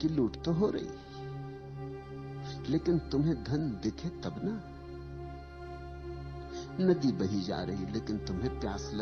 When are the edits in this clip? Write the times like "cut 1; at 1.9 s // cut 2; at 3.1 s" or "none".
cut 1; at 4.6 s // cut 2; at 6.8 s